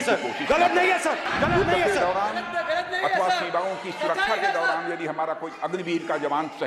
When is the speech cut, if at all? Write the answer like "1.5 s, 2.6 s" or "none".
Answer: 1.3 s